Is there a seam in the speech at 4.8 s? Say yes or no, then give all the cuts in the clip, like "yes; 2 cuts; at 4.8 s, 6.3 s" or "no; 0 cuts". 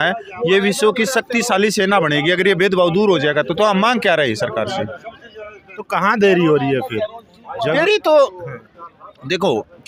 no; 0 cuts